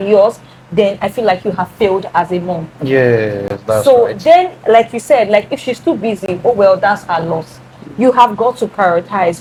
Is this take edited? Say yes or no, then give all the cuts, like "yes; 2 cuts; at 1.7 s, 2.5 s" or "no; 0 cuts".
no; 0 cuts